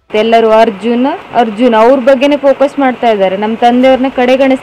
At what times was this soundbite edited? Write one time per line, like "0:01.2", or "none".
0:01.2